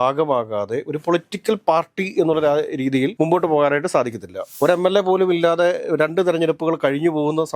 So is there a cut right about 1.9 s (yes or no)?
no